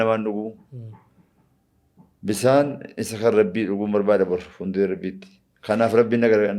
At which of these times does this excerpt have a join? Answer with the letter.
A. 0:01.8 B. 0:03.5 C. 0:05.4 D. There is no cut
D